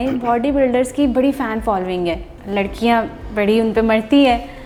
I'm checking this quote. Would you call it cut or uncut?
uncut